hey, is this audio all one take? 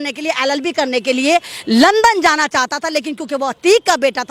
yes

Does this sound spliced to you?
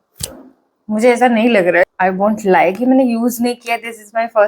yes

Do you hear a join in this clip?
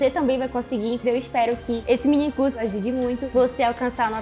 yes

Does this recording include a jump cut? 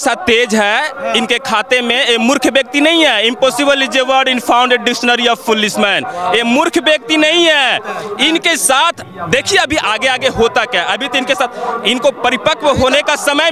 no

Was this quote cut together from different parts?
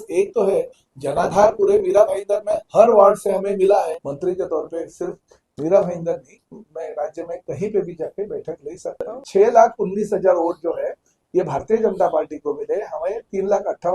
yes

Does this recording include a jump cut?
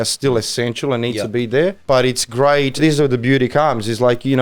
yes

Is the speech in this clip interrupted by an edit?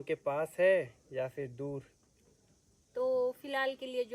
no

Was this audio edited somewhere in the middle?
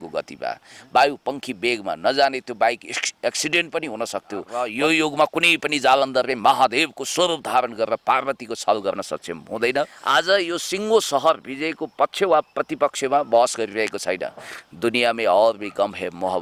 yes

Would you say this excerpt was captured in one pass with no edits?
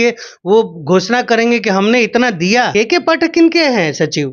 no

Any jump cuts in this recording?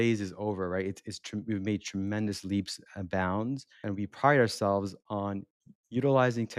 yes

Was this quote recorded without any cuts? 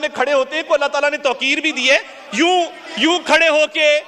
yes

